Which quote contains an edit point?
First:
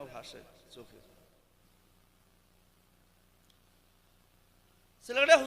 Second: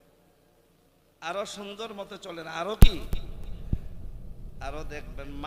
first; 1 cut; at 1.4 s

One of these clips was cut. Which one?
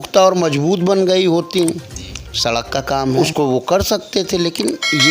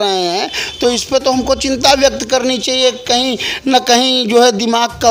first; 1 cut; at 3.2 s

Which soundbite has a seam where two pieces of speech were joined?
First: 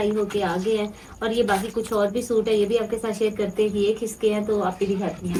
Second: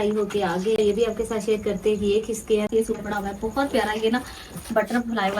second; 2 cuts; at 0.8 s, 2.7 s

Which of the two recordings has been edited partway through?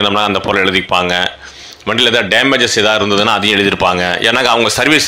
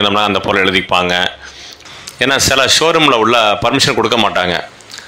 second; 1 cut; at 1.7 s

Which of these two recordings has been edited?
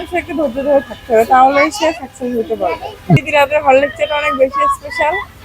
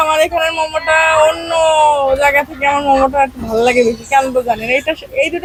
first; 1 cut; at 3.2 s

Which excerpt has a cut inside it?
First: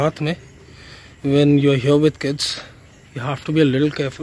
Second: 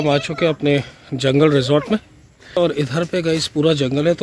second; 1 cut; at 2.6 s

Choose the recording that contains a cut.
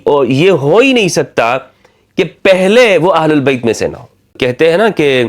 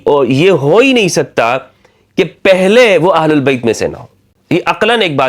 first; 1 cut; at 4.4 s

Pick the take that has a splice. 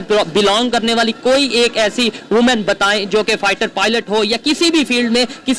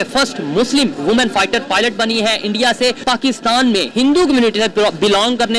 second; 1 cut; at 3.0 s

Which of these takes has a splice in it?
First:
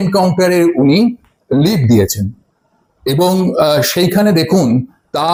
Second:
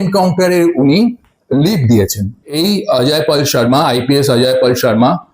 second; 1 cut; at 2.6 s

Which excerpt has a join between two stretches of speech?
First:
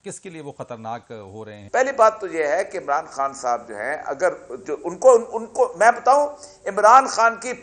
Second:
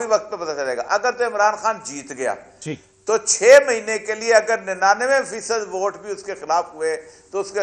first; 1 cut; at 1.5 s

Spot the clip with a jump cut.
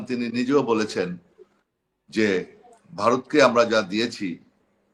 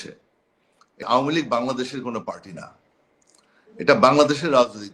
second; 1 cut; at 1.0 s

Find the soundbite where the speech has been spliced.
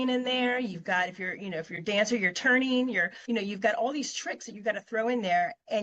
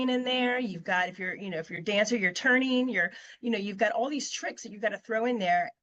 first; 1 cut; at 3.1 s

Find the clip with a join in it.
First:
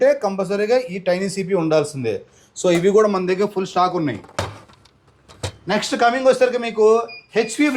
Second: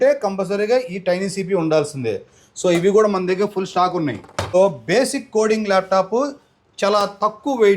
second; 1 cut; at 4.5 s

